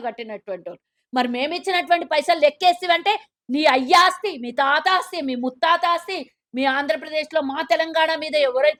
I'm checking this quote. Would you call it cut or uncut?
uncut